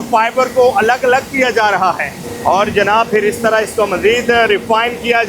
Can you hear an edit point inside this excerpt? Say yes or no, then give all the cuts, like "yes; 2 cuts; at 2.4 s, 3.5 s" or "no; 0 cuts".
no; 0 cuts